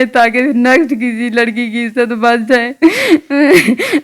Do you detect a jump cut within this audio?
no; 0 cuts

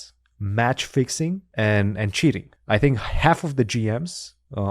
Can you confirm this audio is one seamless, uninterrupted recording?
no; 2 cuts; at 1.5 s, 2.5 s

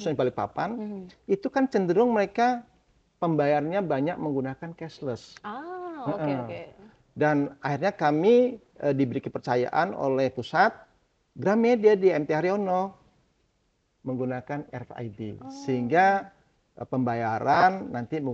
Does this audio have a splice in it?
no; 0 cuts

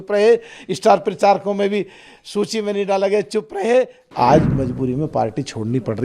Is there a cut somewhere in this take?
yes; 1 cut; at 4.0 s

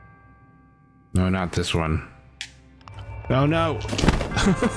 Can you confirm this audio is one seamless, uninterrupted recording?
yes; 0 cuts

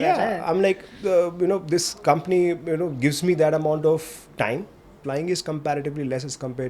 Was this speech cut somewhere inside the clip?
yes; 1 cut; at 5.0 s

